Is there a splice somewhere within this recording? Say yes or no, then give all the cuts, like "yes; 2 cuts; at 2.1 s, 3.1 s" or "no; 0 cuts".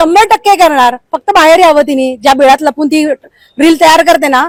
no; 0 cuts